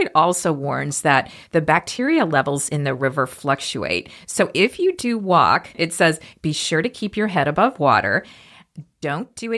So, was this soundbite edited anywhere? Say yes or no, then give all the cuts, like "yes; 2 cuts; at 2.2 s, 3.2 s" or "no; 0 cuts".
yes; 1 cut; at 5.8 s